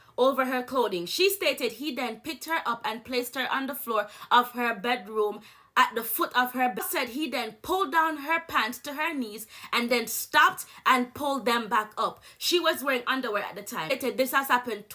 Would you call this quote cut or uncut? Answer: cut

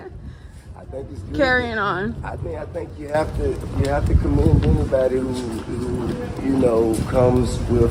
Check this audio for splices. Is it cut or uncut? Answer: uncut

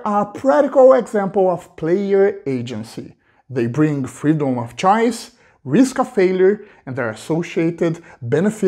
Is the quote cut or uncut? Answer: uncut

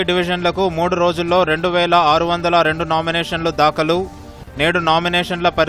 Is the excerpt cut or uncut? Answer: uncut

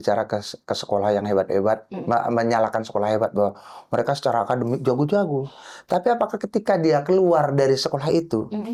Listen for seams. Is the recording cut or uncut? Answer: uncut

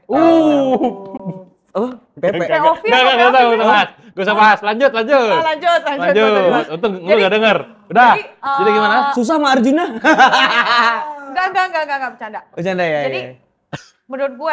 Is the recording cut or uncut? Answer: uncut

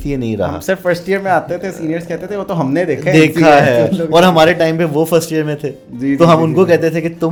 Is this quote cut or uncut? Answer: uncut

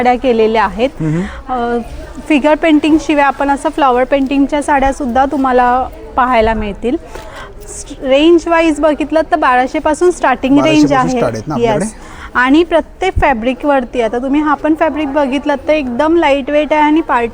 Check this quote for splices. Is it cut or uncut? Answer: uncut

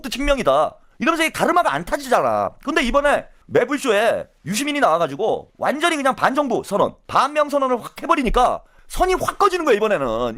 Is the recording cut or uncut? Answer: uncut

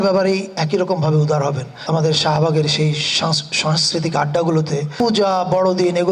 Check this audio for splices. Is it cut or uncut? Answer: cut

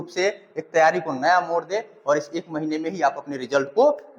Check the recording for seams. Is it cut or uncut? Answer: uncut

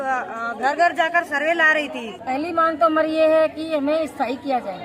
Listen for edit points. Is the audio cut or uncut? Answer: cut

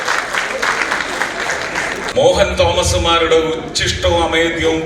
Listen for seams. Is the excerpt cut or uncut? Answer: cut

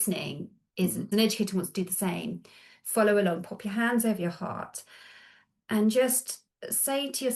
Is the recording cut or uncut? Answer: cut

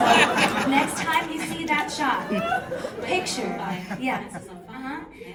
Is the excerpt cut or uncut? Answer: uncut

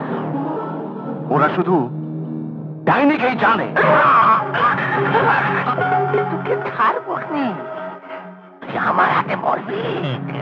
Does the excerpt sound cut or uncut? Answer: uncut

